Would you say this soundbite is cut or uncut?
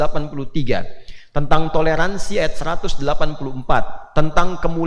uncut